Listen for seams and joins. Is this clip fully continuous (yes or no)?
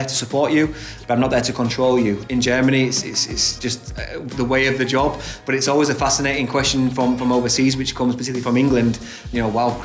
no